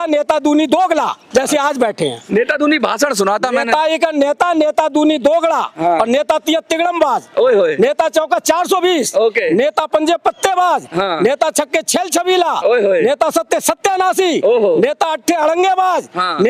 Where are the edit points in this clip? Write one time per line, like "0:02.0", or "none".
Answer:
none